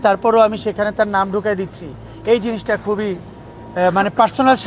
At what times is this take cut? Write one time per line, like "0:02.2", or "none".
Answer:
none